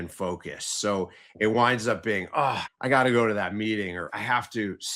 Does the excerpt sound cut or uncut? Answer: cut